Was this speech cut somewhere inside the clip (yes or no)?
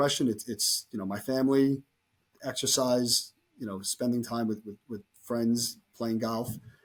no